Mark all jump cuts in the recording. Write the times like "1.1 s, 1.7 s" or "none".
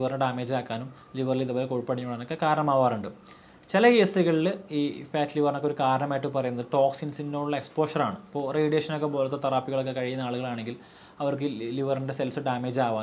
none